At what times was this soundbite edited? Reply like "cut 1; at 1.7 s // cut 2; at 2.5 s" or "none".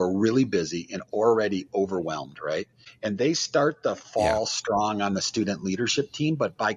cut 1; at 2.8 s